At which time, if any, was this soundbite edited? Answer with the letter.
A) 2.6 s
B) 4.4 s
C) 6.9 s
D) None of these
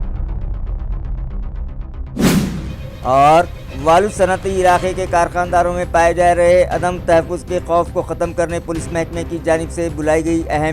A